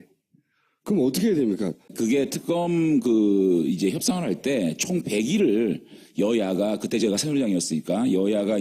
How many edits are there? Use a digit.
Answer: 1